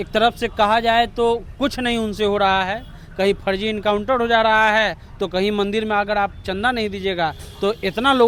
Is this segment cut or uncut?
uncut